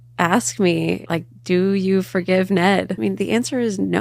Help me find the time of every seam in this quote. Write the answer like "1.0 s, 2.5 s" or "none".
1.0 s, 2.9 s

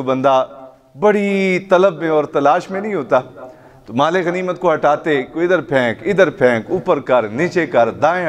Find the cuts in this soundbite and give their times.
none

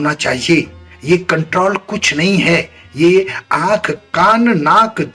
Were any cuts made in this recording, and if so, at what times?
none

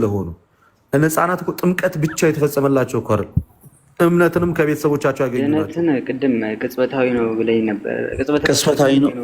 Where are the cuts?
5.4 s

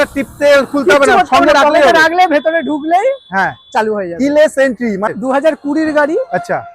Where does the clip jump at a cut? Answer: 5.1 s

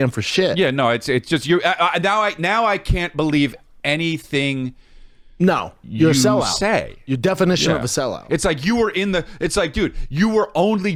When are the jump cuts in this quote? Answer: none

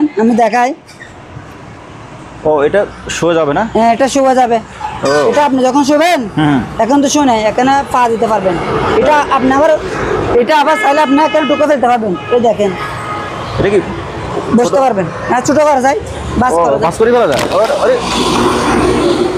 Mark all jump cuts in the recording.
none

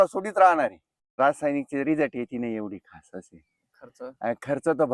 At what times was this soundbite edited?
1.1 s

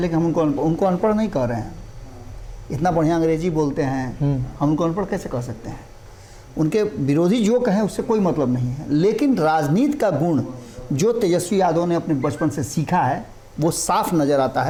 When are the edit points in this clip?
none

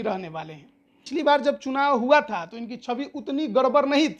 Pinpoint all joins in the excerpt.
1.0 s

